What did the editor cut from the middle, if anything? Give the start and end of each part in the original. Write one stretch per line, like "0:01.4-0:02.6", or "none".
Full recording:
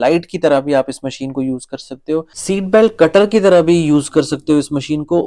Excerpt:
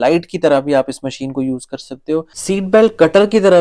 none

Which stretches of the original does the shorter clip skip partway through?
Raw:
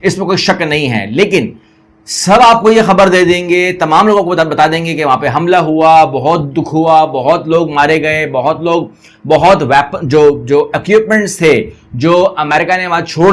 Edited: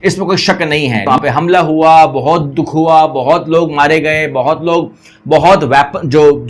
0:01.0-0:05.0

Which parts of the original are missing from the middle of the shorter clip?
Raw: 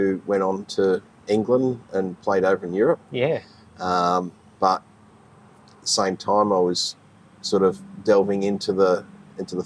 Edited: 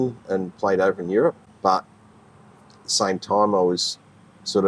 0:03.1-0:04.4

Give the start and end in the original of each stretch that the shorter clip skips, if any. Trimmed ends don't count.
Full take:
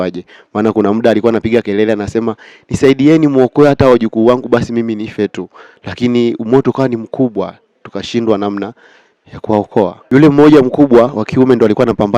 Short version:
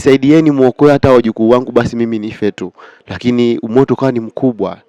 none

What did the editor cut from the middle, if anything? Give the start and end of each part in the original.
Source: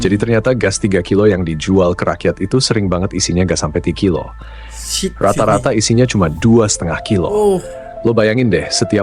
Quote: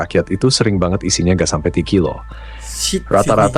none

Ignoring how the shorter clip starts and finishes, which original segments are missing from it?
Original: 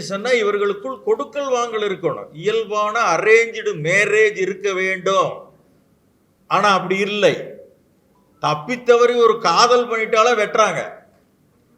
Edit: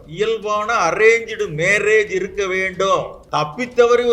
0:05.4-0:08.3

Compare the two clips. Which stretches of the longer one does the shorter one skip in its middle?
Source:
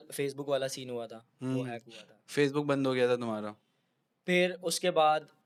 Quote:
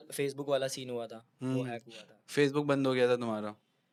none

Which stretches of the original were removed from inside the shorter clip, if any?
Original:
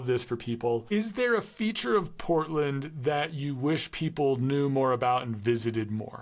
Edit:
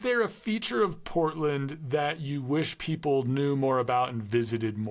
none

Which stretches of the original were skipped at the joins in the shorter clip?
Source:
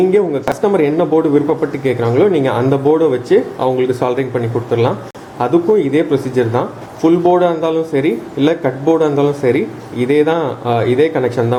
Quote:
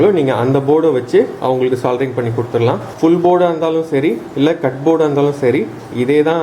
0:05.0-0:06.9

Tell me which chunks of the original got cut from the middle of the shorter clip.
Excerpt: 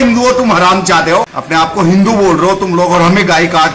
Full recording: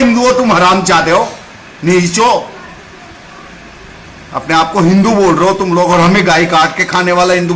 0:01.4-0:04.4

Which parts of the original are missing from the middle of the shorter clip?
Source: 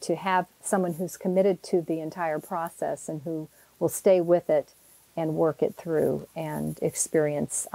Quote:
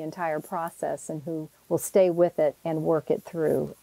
0:03.5-0:03.6
0:04.7-0:05.1

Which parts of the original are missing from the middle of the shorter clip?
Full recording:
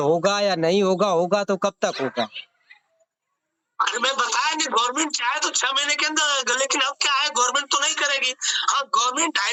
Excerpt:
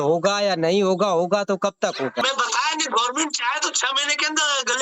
0:02.2-0:04.0

